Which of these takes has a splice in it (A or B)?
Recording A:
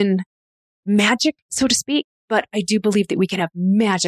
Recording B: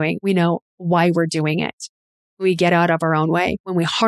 A